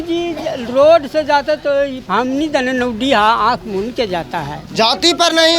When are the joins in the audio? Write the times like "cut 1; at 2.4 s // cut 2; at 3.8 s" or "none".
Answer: cut 1; at 2.0 s // cut 2; at 4.6 s